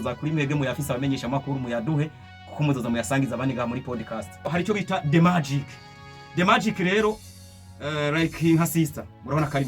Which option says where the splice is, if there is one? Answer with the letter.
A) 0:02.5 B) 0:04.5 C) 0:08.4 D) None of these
B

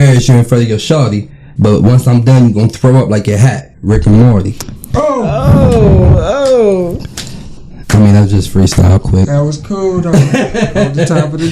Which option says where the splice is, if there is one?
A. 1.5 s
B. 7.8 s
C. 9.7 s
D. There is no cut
D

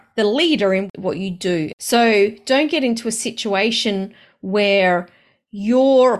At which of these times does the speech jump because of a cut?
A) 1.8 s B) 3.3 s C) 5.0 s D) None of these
A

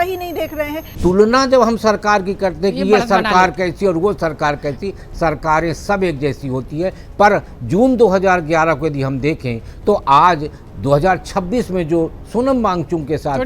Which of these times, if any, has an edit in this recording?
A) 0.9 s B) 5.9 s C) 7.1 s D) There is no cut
A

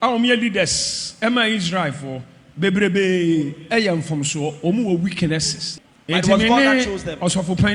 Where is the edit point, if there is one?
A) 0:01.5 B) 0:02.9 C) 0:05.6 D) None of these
C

